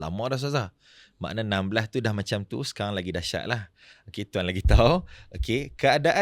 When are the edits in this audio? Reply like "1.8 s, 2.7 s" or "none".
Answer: none